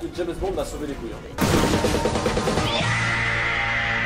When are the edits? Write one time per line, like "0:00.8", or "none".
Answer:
0:01.2